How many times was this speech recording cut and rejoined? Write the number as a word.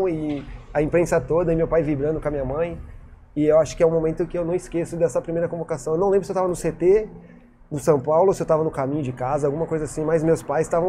zero